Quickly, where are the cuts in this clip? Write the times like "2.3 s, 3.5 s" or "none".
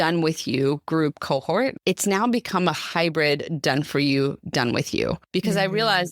1.8 s, 5.2 s